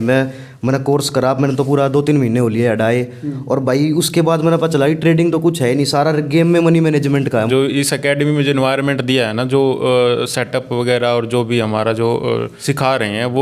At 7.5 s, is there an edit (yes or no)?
yes